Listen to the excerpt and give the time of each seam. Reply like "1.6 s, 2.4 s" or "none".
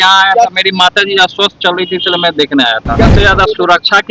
3.1 s